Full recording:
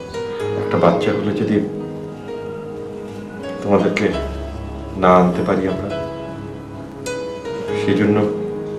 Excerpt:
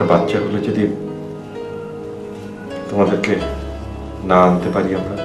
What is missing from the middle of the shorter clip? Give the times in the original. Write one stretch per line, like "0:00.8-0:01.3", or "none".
none

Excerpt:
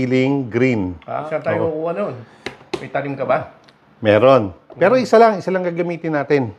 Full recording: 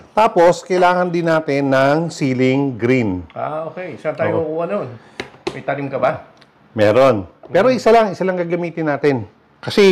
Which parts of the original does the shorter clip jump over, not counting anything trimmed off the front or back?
0:03.5-0:04.0

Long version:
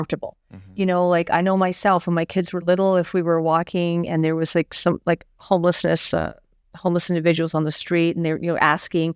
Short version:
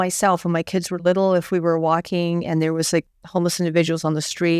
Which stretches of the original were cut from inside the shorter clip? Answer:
0:04.7-0:06.6

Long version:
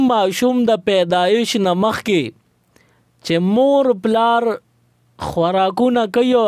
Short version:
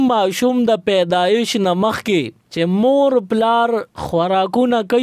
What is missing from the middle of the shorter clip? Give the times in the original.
0:02.4-0:03.1
0:04.7-0:05.2

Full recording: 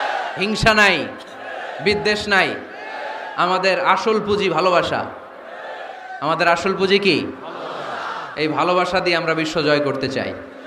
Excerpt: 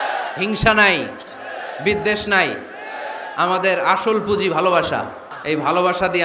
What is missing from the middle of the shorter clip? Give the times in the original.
0:05.3-0:08.2

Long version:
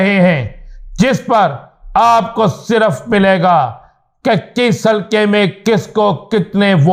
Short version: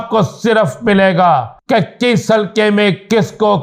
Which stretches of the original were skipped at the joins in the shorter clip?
0:03.8-0:04.1

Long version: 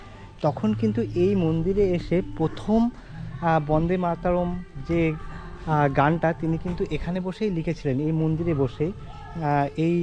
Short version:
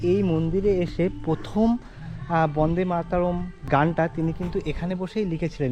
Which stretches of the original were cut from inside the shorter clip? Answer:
0:04.8-0:05.9

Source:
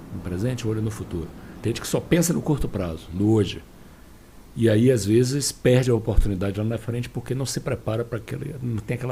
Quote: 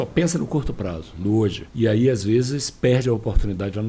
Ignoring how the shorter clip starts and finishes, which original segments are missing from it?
0:03.6-0:04.5

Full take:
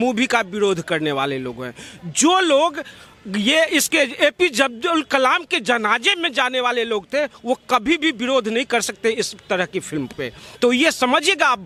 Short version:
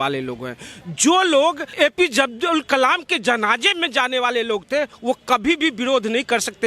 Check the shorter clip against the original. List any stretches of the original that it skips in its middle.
0:02.9-0:04.1

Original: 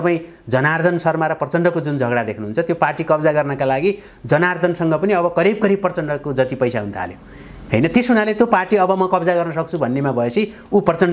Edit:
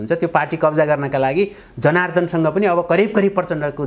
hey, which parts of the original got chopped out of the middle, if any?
none

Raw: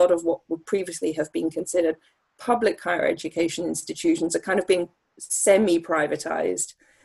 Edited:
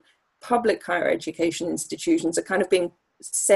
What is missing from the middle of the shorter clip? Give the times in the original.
none

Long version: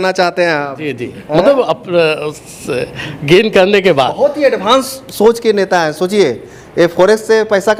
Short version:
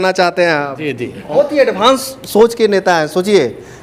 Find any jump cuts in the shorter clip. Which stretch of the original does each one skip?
0:01.3-0:04.1

